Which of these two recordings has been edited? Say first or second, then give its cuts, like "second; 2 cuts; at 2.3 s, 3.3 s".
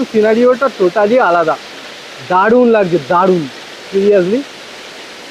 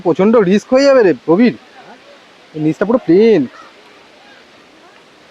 second; 1 cut; at 1.2 s